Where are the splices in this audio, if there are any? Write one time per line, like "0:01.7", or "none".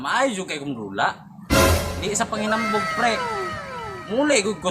0:01.3
0:02.0